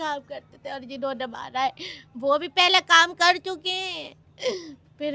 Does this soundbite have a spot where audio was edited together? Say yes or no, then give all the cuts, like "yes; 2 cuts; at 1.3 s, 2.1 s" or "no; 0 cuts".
no; 0 cuts